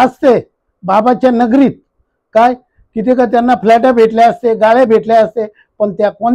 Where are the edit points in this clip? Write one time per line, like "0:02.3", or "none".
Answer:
none